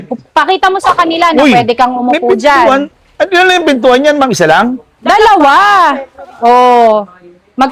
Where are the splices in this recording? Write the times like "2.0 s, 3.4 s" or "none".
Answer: none

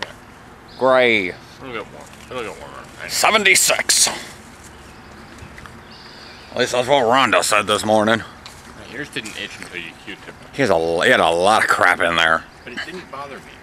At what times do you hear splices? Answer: 10.4 s, 12.5 s

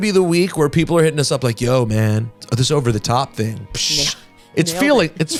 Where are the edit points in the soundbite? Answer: none

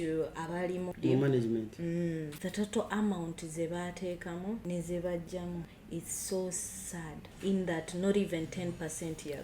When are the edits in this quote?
0.9 s, 2.4 s, 4.6 s, 5.8 s, 7.2 s

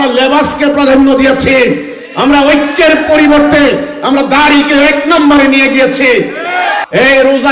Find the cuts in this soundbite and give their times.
6.3 s

